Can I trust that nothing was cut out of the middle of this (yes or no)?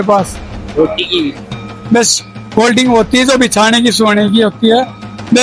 yes